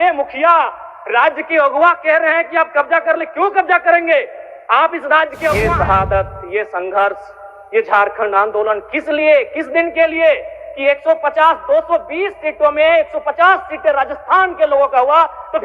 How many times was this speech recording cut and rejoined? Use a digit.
1